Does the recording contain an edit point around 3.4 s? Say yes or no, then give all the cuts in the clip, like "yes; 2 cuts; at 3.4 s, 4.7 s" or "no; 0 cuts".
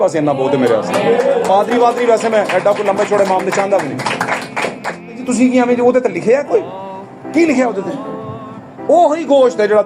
no; 1 cut; at 5.2 s